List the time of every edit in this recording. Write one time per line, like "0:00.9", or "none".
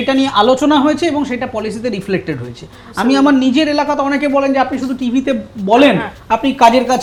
none